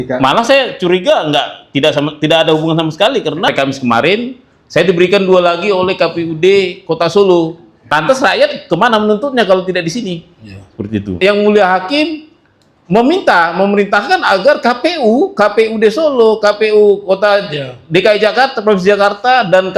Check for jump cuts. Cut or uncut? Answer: cut